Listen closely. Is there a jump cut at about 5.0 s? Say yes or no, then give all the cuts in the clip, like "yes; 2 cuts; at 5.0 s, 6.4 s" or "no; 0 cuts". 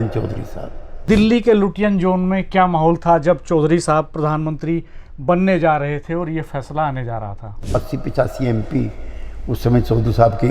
no; 2 cuts; at 1.0 s, 7.6 s